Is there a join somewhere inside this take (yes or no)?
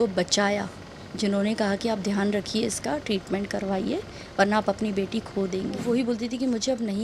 yes